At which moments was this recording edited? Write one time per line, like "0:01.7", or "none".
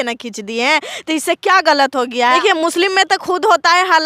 none